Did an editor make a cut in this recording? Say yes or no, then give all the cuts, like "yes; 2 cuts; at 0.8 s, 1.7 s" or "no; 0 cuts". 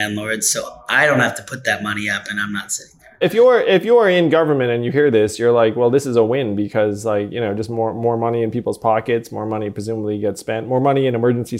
yes; 1 cut; at 3.2 s